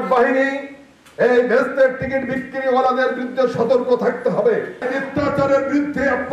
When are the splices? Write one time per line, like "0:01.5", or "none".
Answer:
0:04.9